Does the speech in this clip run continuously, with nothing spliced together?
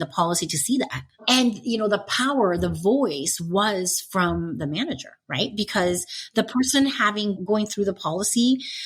no; 2 cuts; at 1.2 s, 7.4 s

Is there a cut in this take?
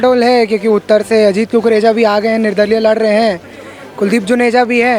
no; 0 cuts

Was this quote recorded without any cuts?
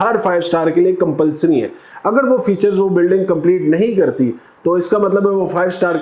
yes; 0 cuts

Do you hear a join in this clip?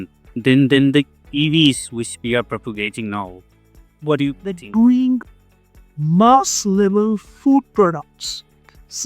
yes; 1 cut; at 4.5 s

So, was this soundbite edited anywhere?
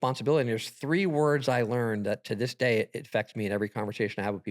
no; 0 cuts

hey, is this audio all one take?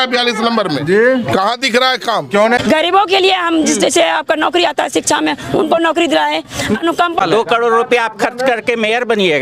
no; 2 cuts; at 2.6 s, 7.2 s

